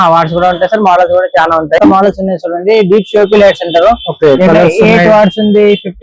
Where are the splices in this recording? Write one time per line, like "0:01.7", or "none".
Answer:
0:01.8